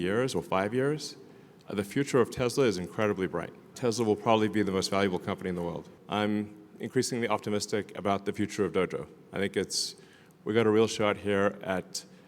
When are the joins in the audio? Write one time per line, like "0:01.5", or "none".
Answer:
0:03.8
0:05.9